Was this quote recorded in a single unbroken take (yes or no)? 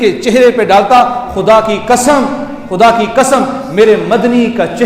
yes